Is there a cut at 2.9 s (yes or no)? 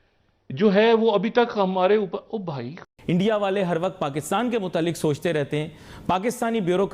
yes